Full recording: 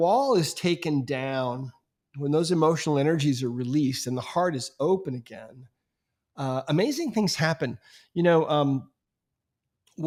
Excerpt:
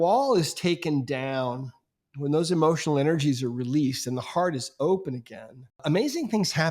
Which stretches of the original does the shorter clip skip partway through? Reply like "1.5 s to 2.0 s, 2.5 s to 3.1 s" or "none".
5.8 s to 6.6 s

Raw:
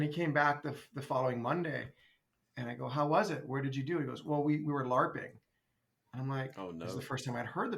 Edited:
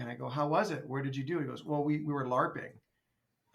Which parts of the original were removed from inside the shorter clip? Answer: none

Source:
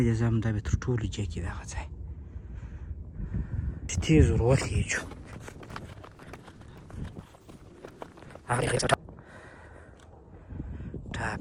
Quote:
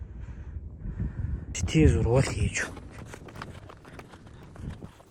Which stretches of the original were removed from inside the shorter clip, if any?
none

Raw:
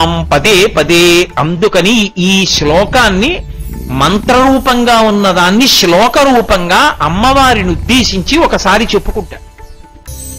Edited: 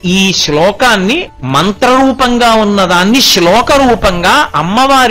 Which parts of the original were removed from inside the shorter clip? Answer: 3.5 s to 3.8 s

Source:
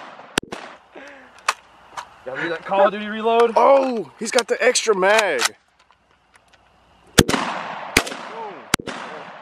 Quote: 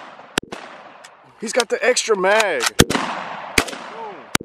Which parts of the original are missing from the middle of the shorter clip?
1.3 s to 4.1 s, 5.5 s to 7.1 s

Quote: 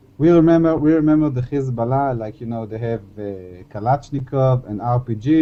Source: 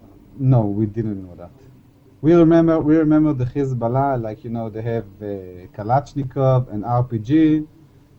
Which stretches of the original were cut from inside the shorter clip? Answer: none

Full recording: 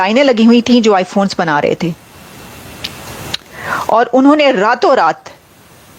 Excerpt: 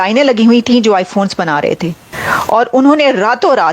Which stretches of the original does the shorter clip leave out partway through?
2.1 s to 3.5 s

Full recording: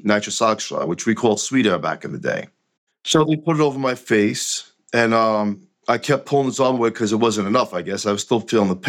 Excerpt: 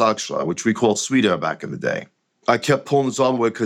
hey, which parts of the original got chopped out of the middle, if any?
2.7 s to 5.7 s

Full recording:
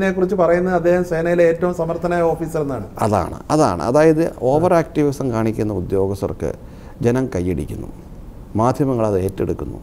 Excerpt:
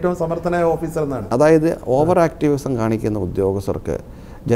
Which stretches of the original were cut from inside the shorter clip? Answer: 2.8 s to 3.8 s

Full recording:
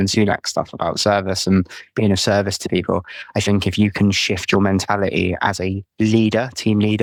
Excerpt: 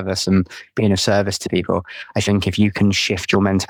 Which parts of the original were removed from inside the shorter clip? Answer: none

